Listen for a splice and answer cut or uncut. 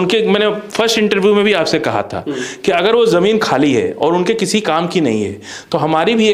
uncut